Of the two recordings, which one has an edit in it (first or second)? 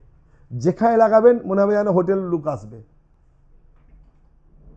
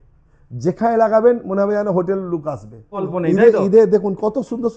second